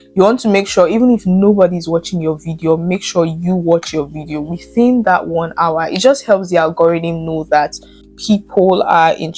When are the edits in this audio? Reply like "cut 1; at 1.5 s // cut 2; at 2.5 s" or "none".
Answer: cut 1; at 8.1 s